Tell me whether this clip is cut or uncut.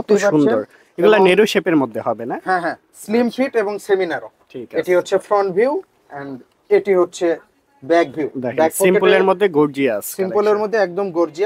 uncut